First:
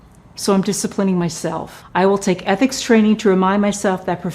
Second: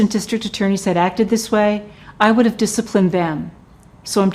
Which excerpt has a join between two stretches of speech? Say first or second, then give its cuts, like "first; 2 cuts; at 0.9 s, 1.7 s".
first; 1 cut; at 1.7 s